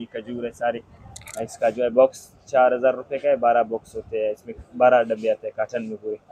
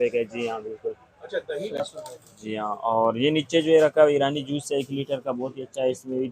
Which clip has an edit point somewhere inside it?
second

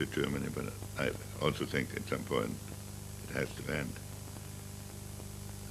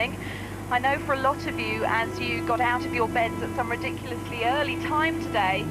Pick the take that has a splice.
second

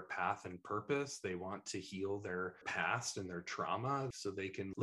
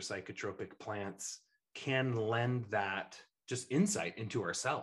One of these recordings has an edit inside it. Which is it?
first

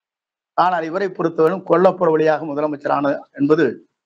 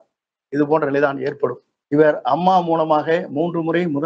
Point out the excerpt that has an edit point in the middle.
second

